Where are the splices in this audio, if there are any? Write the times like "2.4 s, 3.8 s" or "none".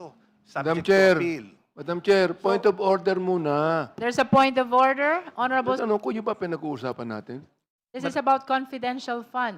5.8 s